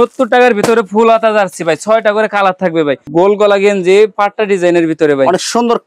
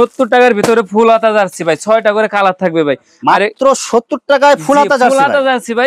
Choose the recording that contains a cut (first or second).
first